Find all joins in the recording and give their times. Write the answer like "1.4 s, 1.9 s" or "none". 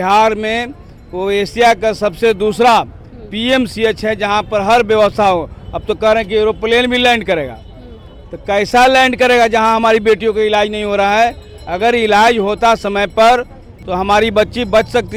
none